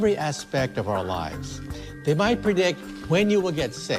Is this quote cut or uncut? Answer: cut